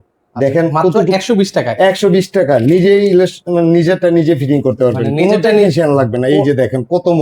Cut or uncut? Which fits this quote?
uncut